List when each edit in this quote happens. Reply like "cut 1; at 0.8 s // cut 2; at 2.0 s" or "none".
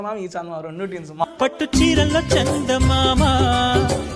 cut 1; at 1.2 s